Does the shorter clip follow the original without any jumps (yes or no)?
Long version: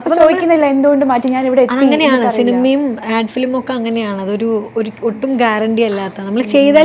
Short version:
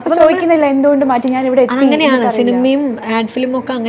yes